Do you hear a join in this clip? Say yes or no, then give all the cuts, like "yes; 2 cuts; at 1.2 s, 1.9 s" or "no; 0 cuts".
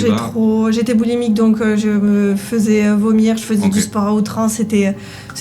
no; 0 cuts